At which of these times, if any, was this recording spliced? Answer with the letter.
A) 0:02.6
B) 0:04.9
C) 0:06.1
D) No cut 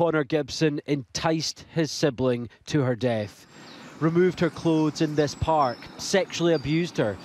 D